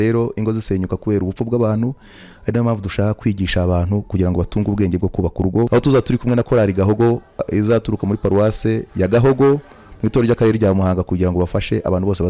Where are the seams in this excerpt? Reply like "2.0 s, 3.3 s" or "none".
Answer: 5.7 s, 7.5 s